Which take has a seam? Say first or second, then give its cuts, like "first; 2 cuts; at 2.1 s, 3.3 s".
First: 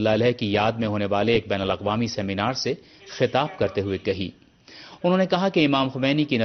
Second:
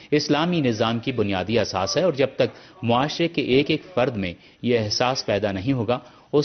first; 1 cut; at 3.3 s